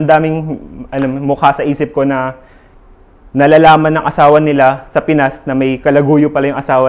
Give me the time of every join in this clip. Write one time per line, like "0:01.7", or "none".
none